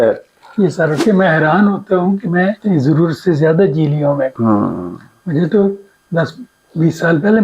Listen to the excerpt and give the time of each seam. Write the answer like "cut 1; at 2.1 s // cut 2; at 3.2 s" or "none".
cut 1; at 1.0 s // cut 2; at 2.6 s // cut 3; at 4.3 s